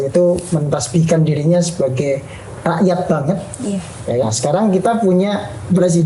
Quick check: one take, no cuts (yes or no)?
no